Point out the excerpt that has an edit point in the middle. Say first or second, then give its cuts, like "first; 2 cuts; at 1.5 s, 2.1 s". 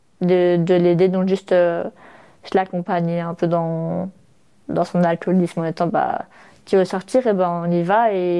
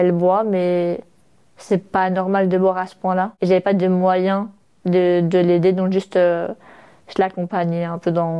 second; 1 cut; at 3.3 s